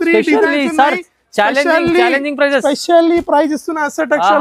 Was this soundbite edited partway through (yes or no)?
no